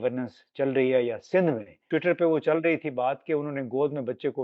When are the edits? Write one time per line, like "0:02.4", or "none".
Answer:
0:01.7